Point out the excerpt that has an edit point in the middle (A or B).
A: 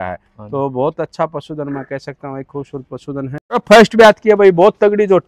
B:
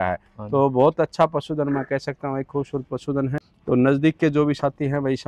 A